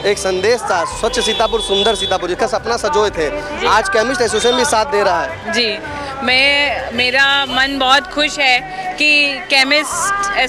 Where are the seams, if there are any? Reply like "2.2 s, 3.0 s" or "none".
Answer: none